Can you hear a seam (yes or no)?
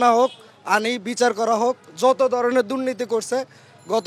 no